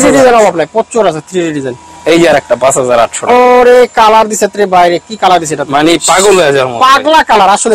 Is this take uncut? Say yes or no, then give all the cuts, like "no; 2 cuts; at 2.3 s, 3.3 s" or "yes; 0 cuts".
yes; 0 cuts